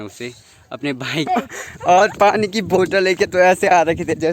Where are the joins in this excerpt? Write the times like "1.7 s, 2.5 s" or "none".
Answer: 1.3 s